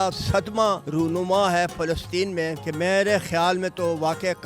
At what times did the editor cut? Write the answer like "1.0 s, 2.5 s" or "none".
0.8 s, 2.6 s